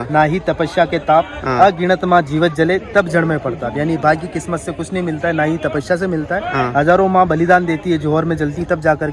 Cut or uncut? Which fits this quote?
uncut